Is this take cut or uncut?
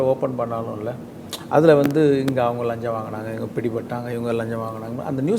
uncut